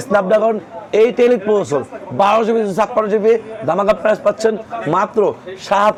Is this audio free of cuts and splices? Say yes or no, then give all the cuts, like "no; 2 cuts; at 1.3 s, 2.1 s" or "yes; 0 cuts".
yes; 0 cuts